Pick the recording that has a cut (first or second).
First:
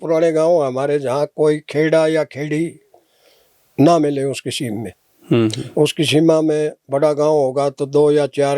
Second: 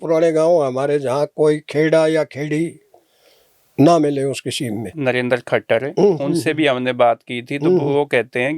second